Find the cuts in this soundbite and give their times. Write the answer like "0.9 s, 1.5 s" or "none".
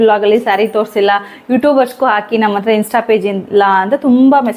none